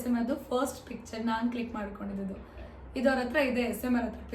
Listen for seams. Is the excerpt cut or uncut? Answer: uncut